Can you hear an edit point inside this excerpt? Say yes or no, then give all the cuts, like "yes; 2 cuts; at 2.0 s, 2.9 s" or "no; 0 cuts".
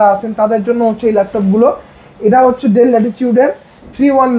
no; 0 cuts